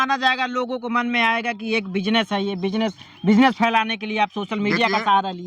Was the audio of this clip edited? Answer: no; 0 cuts

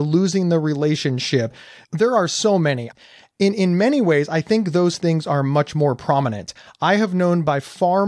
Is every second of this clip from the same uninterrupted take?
no; 2 cuts; at 1.6 s, 2.9 s

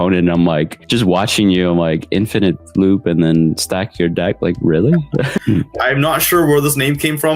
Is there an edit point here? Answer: yes; 1 cut; at 5.2 s

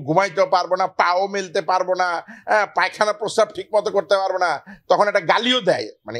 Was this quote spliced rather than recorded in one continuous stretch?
no; 0 cuts

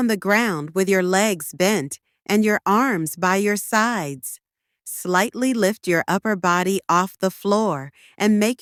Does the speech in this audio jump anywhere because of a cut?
no; 0 cuts

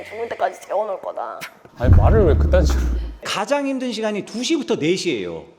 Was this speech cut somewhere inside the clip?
yes; 2 cuts; at 1.7 s, 3.1 s

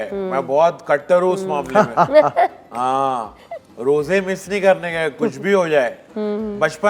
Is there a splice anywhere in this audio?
no; 0 cuts

